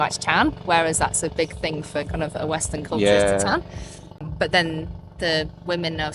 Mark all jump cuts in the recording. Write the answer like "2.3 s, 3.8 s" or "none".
4.1 s